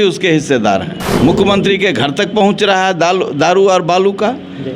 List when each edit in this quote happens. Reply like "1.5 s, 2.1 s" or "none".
1.1 s